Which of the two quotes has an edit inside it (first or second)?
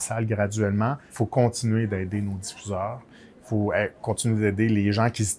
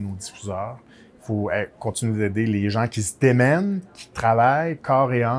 first